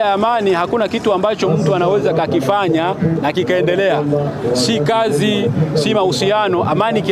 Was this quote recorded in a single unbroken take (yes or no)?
yes